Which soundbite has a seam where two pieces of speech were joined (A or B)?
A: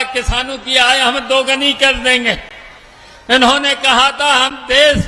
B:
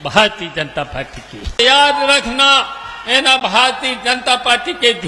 B